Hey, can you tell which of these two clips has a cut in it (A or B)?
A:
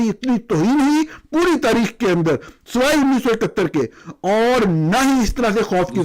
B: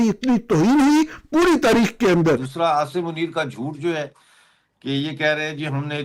B